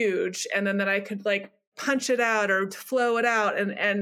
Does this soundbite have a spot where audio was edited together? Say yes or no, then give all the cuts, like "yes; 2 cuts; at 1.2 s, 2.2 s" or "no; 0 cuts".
yes; 1 cut; at 1.7 s